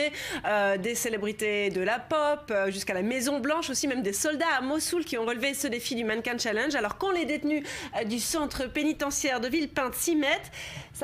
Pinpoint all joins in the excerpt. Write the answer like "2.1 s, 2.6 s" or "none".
2.4 s